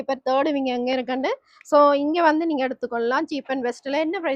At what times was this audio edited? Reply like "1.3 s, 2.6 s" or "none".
none